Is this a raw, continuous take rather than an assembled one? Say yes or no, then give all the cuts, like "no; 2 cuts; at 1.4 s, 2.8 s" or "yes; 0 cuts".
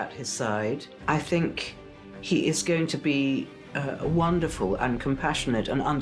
no; 1 cut; at 0.9 s